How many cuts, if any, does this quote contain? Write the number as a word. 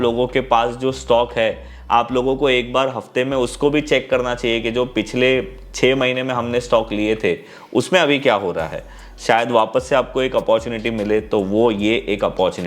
zero